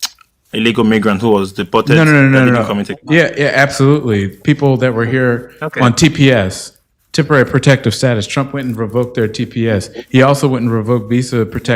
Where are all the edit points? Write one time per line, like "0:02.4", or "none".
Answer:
0:02.1